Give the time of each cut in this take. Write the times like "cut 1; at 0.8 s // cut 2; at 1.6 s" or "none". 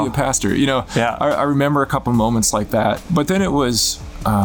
cut 1; at 3.0 s